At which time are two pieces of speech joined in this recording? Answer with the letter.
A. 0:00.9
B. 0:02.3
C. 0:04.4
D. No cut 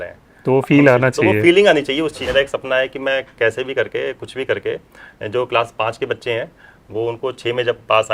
B